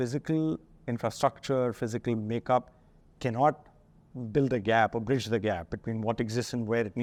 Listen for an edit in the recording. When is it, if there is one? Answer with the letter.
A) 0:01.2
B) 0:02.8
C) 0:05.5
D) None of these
D